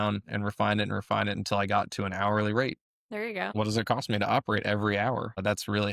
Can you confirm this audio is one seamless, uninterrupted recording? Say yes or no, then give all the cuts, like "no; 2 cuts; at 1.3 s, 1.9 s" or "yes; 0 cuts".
yes; 0 cuts